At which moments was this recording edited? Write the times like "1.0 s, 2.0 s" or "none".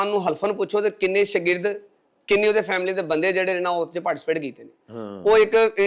none